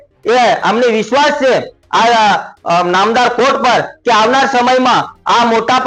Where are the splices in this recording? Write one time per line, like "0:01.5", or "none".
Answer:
none